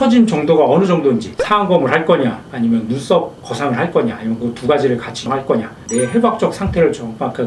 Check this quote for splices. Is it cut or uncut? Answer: cut